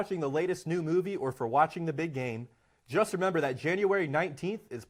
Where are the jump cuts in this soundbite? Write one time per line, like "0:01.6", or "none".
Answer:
none

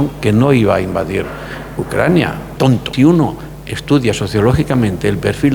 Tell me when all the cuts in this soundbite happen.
0:02.8

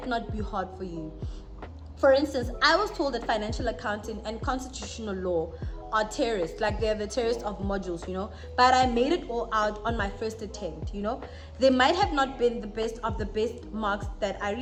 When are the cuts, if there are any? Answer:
none

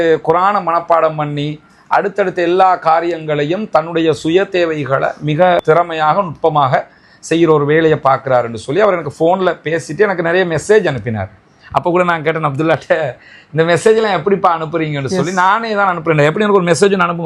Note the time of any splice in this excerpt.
0:05.6

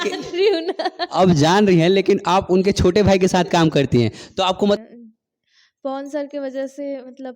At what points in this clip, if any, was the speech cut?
0:04.8

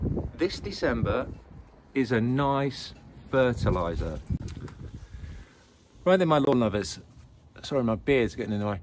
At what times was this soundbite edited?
0:04.6

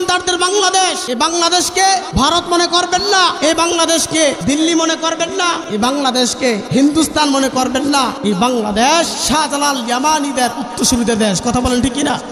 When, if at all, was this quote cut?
0:01.0
0:02.1
0:03.4
0:04.4
0:05.6
0:06.6
0:08.2
0:09.2

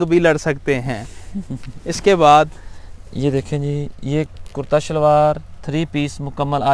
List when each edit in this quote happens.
none

